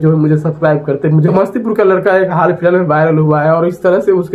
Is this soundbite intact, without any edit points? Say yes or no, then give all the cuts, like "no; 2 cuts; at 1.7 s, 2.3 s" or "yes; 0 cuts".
no; 1 cut; at 1.3 s